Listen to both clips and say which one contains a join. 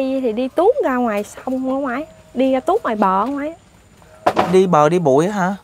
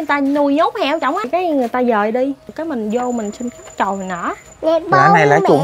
second; 3 cuts; at 1.3 s, 2.5 s, 4.5 s

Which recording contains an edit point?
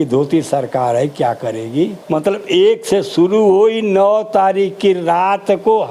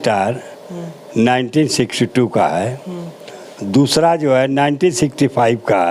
first; 1 cut; at 2.0 s

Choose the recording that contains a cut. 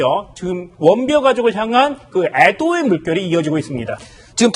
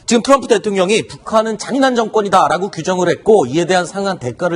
first; 1 cut; at 3.1 s

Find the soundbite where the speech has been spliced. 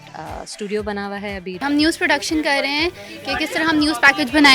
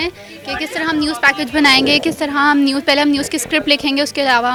first; 1 cut; at 1.6 s

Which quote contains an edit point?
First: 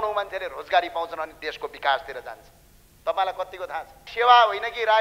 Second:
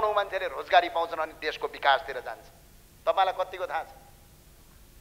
first; 1 cut; at 4.0 s

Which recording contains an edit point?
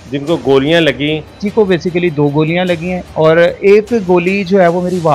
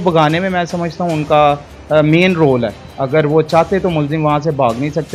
first; 2 cuts; at 1.4 s, 3.1 s

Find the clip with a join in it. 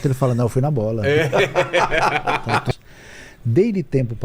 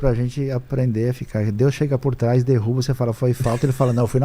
first; 1 cut; at 2.7 s

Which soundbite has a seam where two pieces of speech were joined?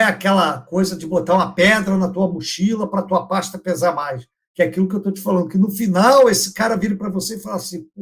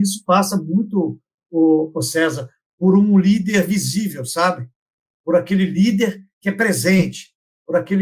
first; 1 cut; at 4.4 s

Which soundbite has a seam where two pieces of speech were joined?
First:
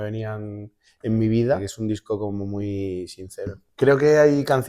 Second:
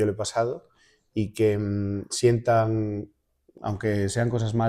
first; 2 cuts; at 1.7 s, 3.6 s

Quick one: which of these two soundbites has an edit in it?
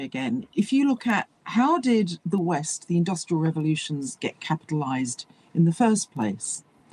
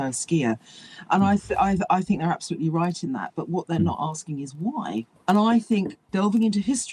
second; 2 cuts; at 5.1 s, 6.0 s

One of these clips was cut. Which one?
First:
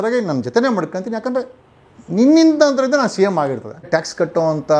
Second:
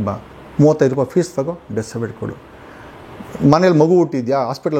first; 1 cut; at 3.9 s

